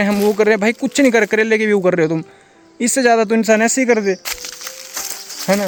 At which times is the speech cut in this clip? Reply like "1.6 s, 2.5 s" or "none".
none